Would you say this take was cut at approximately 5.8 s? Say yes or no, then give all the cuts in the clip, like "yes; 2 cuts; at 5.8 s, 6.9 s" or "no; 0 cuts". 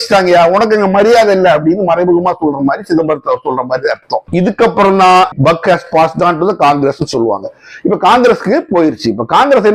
no; 1 cut; at 4.2 s